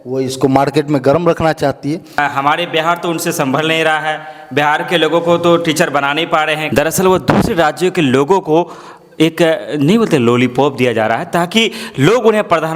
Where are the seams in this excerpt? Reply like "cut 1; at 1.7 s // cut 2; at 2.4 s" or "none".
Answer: cut 1; at 2.2 s // cut 2; at 6.6 s